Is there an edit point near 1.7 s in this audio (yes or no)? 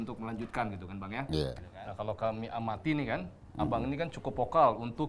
yes